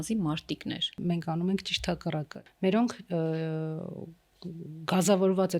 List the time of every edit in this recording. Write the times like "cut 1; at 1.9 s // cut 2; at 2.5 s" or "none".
cut 1; at 1.0 s // cut 2; at 2.4 s